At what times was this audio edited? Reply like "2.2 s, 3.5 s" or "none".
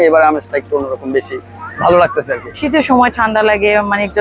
2.5 s